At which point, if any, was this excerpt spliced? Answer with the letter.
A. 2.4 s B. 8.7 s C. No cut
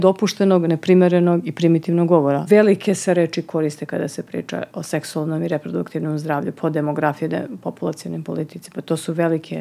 A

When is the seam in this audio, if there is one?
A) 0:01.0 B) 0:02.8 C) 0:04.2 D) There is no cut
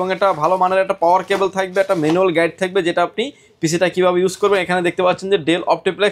D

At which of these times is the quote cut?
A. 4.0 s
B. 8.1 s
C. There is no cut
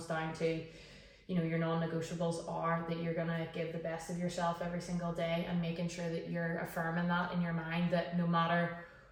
C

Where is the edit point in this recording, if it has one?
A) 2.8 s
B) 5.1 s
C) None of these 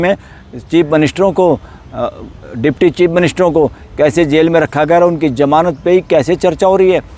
C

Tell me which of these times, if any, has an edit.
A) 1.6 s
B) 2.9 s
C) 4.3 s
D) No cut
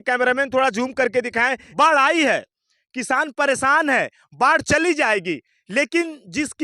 A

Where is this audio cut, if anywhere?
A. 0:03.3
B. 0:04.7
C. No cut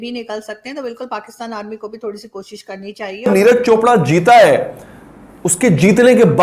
A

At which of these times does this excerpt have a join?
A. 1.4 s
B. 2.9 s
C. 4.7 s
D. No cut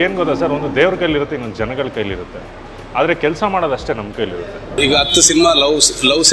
C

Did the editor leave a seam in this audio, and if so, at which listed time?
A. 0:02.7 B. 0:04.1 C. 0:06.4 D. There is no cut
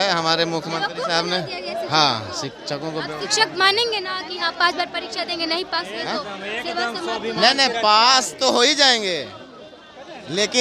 D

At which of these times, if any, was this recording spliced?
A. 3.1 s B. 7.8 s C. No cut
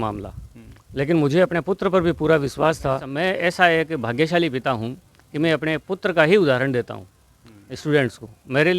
A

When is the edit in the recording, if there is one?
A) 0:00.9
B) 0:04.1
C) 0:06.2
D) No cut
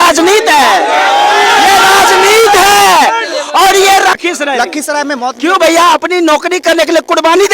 B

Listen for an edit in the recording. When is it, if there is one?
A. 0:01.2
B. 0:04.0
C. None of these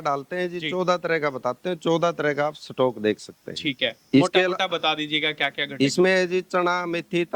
C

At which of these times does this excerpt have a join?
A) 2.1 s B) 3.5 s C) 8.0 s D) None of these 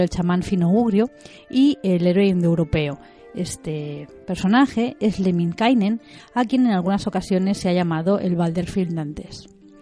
B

